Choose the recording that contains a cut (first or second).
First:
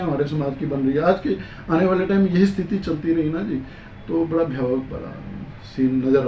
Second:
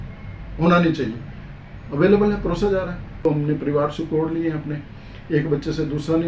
second